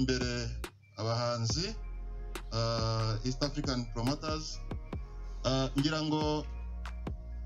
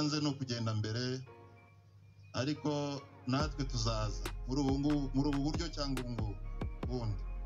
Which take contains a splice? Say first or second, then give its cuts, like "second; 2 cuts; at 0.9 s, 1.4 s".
first; 1 cut; at 6.4 s